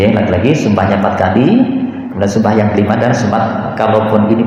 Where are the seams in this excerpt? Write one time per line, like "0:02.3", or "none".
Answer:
none